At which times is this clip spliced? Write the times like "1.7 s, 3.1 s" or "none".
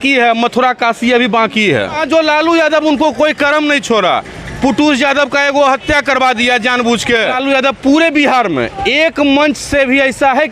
2.0 s, 7.3 s